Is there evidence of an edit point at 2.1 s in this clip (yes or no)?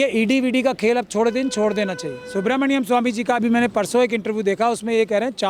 yes